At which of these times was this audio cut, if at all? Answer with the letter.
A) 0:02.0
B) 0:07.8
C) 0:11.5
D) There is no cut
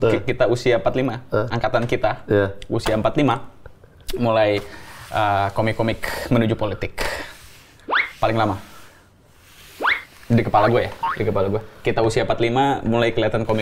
D